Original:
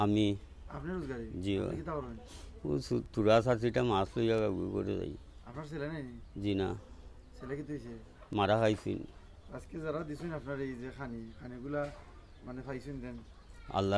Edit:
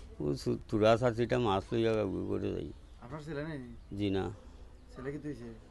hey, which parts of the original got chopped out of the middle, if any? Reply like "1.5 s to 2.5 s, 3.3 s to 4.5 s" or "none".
none